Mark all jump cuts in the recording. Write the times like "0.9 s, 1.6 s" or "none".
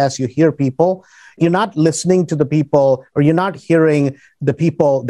1.4 s